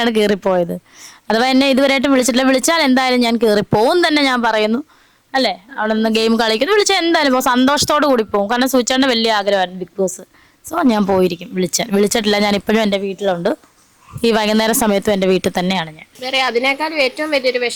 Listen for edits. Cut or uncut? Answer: uncut